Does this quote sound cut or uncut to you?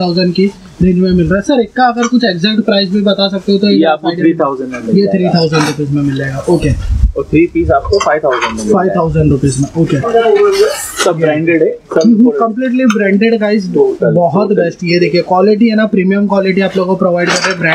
uncut